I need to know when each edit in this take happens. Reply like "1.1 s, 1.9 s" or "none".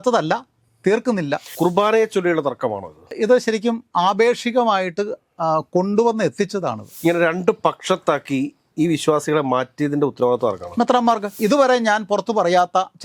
1.5 s, 6.9 s, 11.4 s